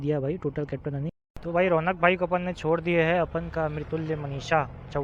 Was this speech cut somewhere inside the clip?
yes; 1 cut; at 1.3 s

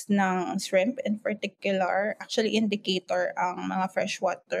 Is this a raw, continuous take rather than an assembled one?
yes; 0 cuts

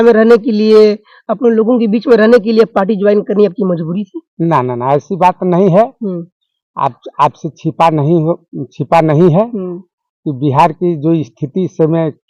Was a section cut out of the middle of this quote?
no; 0 cuts

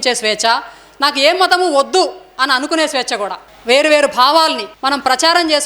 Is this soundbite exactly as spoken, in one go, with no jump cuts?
no; 1 cut; at 3.4 s

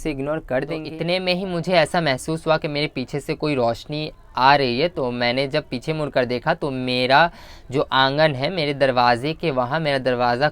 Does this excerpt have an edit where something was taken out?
yes; 1 cut; at 0.9 s

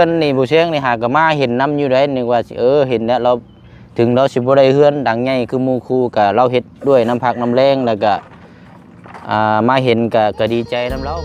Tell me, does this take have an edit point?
no; 0 cuts

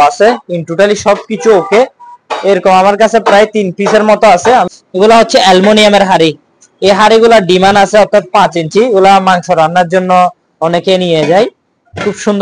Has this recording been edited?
yes; 1 cut; at 4.8 s

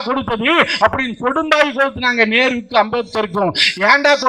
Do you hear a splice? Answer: no; 0 cuts

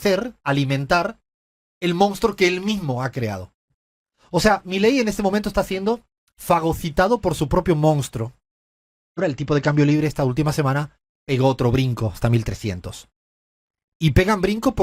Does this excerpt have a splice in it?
yes; 1 cut; at 9.2 s

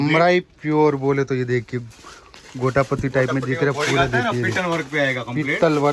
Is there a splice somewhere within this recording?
no; 0 cuts

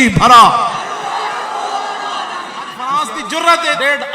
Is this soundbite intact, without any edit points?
no; 1 cut; at 2.8 s

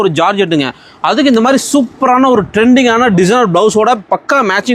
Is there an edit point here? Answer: no; 0 cuts

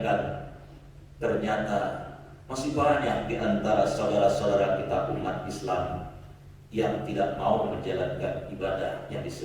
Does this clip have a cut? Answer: no; 0 cuts

